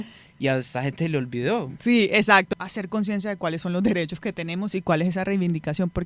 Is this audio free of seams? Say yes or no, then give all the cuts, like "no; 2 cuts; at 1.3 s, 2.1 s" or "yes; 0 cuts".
no; 1 cut; at 2.5 s